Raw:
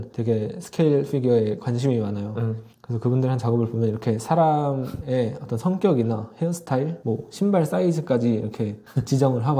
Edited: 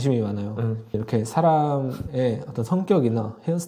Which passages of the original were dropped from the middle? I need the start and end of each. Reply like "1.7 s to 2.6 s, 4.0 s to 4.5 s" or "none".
2.8 s to 3.9 s